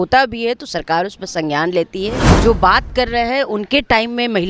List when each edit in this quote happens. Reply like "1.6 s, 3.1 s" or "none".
2.3 s